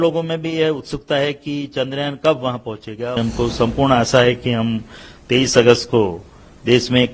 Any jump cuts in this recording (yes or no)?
yes